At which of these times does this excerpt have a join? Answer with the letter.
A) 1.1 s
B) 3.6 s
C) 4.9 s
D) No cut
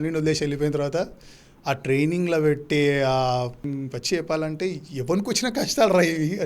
B